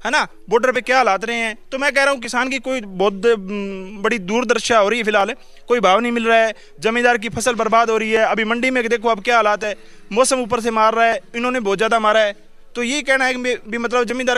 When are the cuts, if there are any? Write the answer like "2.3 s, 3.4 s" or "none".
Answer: none